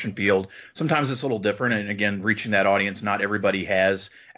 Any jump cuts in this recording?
no; 0 cuts

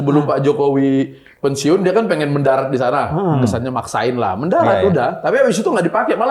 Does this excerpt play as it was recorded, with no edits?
yes; 0 cuts

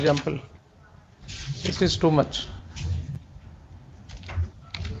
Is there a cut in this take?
no; 0 cuts

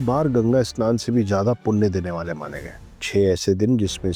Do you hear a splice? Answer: no; 0 cuts

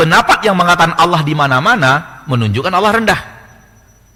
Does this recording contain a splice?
no; 0 cuts

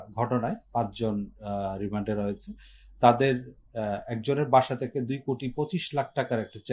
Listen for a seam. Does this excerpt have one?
no; 0 cuts

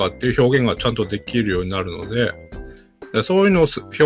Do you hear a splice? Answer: no; 0 cuts

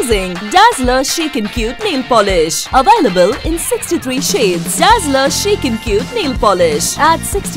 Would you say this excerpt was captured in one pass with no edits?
yes; 0 cuts

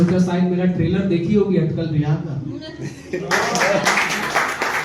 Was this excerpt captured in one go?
yes; 0 cuts

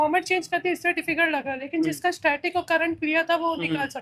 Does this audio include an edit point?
no; 0 cuts

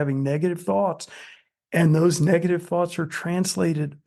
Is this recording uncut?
yes; 0 cuts

